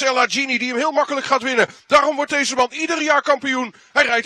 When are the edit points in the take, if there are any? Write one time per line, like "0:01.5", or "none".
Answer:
none

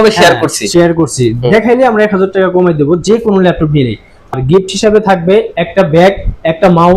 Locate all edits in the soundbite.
0:04.3

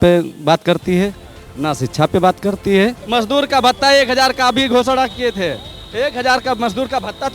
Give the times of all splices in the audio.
0:03.0

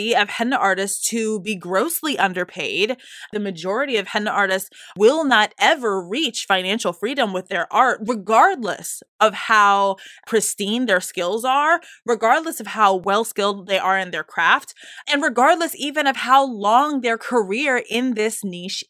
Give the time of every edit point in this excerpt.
none

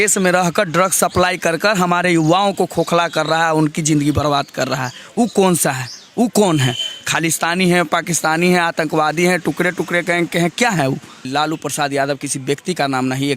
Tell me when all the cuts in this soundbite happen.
0:11.3

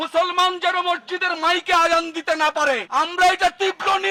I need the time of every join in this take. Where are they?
none

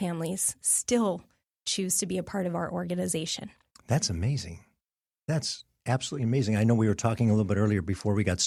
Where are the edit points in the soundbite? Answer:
none

